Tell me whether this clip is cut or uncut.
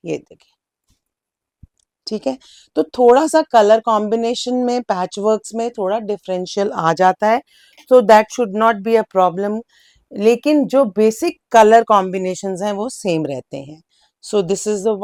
uncut